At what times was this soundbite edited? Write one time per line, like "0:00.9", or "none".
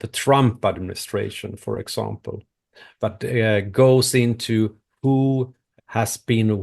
0:05.6